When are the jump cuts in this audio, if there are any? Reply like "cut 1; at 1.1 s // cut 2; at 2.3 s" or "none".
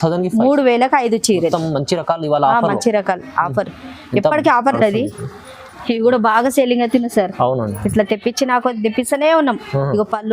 cut 1; at 4.7 s